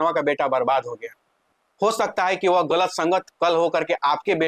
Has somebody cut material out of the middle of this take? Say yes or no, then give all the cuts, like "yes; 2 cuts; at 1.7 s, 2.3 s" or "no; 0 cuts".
no; 0 cuts